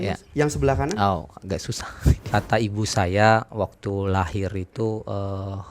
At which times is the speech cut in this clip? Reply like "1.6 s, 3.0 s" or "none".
2.3 s